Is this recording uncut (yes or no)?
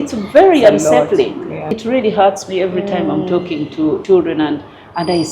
no